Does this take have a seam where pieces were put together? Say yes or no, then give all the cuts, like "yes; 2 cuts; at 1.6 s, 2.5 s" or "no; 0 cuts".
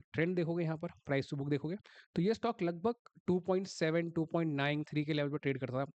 no; 0 cuts